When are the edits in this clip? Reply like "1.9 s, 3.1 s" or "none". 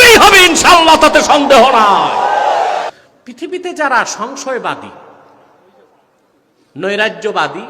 2.9 s